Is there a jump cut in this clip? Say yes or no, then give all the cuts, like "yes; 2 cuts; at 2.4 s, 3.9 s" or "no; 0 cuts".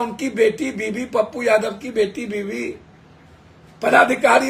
no; 0 cuts